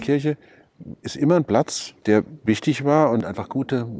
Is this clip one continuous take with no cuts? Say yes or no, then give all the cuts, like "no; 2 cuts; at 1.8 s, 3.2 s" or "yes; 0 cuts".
no; 2 cuts; at 1.8 s, 3.2 s